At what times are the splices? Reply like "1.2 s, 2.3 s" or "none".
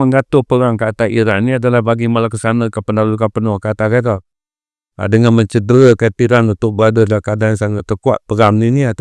none